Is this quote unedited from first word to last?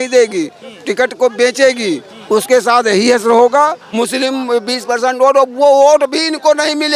no; 1 cut; at 3.8 s

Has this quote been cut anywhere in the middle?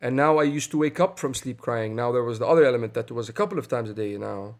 no; 0 cuts

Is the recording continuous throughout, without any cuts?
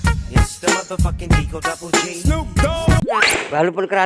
no; 1 cut; at 3.1 s

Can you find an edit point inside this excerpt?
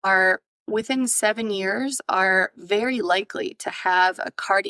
no; 0 cuts

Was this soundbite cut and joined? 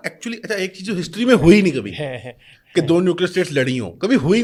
no; 0 cuts

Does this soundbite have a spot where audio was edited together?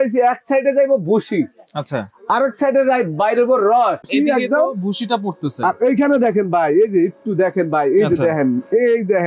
yes; 1 cut; at 4.1 s

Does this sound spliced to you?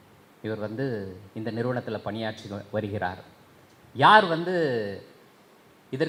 no; 0 cuts

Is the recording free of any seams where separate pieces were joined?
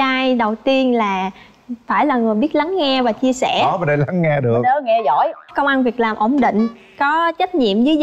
yes; 0 cuts

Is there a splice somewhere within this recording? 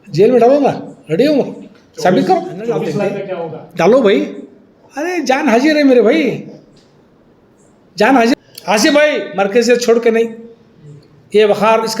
yes; 2 cuts; at 3.2 s, 8.3 s

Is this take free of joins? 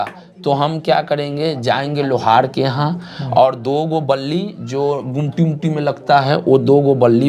yes; 0 cuts

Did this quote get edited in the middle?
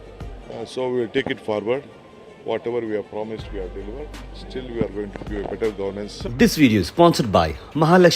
yes; 1 cut; at 6.3 s

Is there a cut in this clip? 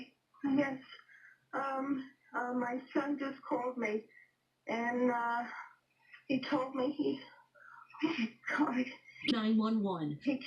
yes; 1 cut; at 9.3 s

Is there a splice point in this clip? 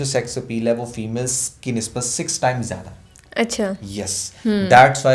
no; 0 cuts

